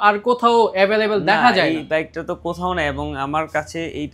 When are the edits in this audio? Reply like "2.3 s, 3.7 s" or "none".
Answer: none

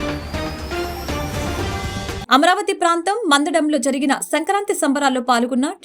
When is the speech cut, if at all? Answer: 2.2 s

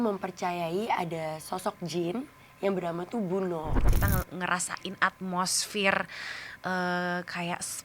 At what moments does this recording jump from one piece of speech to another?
3.8 s

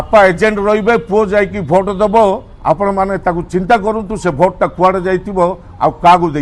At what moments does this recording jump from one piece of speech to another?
none

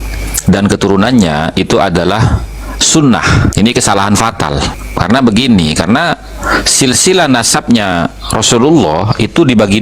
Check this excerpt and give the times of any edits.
3.5 s, 4.8 s

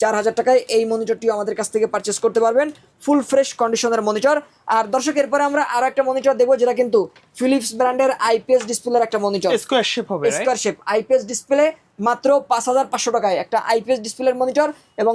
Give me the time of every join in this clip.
none

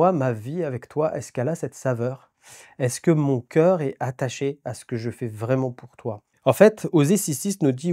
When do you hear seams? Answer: none

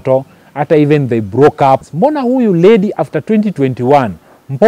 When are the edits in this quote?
1.9 s

